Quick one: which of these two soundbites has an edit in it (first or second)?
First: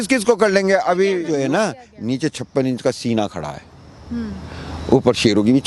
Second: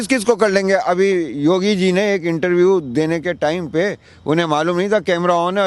first